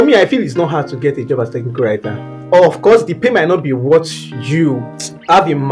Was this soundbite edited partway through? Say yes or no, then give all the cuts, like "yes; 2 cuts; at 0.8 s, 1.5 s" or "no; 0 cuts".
no; 0 cuts